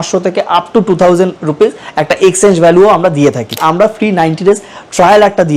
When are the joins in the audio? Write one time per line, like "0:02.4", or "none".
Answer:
0:03.6

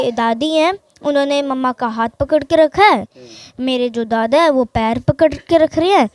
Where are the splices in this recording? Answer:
none

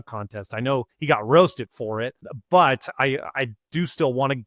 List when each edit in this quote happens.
0:00.9
0:02.3

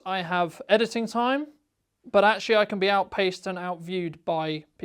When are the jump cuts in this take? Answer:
none

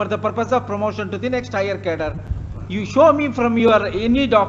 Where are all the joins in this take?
none

